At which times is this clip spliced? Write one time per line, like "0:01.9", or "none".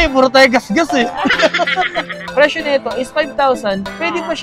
0:02.2